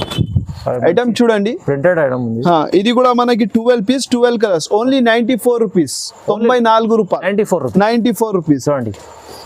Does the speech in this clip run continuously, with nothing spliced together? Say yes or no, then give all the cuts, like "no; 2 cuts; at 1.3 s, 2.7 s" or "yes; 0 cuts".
yes; 0 cuts